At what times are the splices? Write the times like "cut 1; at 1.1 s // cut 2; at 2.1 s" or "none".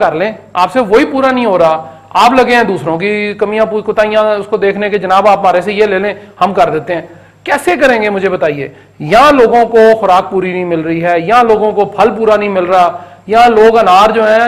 none